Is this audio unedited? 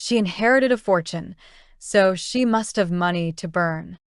yes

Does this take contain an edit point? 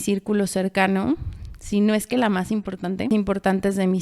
yes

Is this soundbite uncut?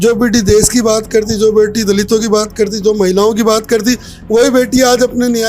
yes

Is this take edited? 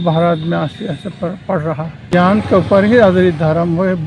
yes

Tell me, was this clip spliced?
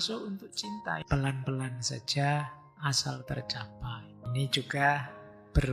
yes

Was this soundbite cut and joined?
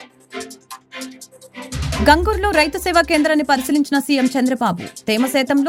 no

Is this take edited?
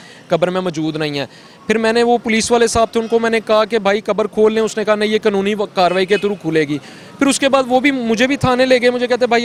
no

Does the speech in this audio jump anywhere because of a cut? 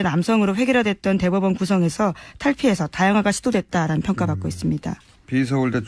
no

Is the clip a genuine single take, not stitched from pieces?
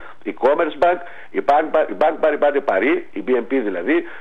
no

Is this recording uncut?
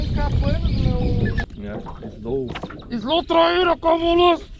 no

